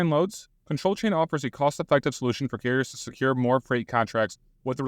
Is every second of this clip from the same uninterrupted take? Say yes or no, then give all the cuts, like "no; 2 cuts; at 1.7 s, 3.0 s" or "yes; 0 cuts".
yes; 0 cuts